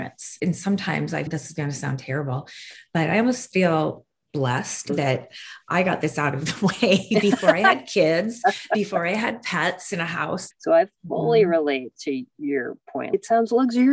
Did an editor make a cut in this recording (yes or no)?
yes